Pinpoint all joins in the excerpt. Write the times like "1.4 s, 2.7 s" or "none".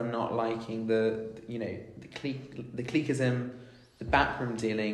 none